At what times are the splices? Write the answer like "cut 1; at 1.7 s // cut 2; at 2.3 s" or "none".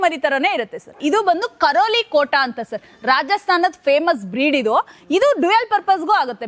none